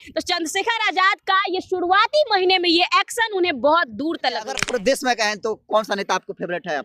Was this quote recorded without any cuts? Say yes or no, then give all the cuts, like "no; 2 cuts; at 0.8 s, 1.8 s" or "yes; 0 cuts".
no; 1 cut; at 4.6 s